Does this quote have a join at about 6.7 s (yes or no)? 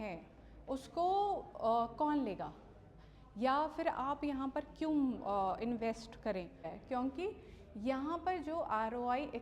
yes